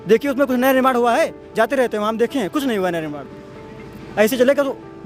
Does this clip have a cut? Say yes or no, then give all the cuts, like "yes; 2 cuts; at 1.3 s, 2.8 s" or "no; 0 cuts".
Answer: no; 0 cuts